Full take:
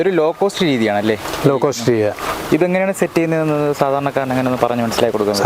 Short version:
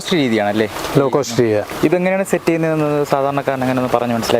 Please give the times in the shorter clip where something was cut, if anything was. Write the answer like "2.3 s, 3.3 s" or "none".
1.7 s